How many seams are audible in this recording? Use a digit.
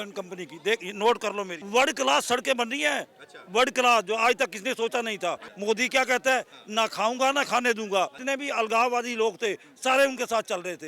3